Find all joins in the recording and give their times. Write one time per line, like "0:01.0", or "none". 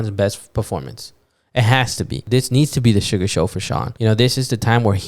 0:02.2
0:03.9